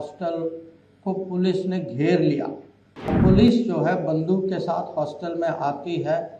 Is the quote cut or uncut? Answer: cut